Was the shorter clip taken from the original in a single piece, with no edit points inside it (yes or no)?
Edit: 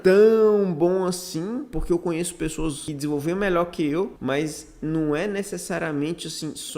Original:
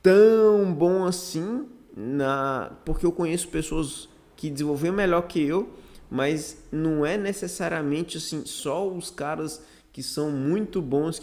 no